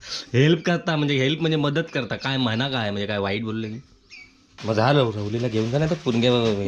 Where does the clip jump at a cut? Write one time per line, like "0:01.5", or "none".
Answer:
0:04.6